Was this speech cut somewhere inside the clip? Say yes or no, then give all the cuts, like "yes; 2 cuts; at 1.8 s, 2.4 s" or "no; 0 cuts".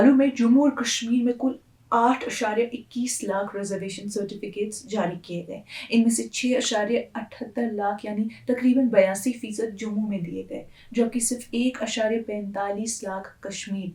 no; 0 cuts